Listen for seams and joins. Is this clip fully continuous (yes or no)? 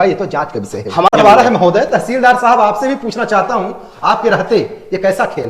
no